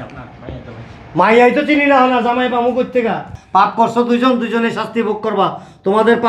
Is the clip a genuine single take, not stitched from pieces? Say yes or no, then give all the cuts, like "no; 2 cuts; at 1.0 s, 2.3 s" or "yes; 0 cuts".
no; 1 cut; at 3.3 s